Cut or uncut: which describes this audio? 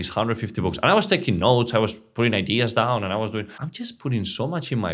cut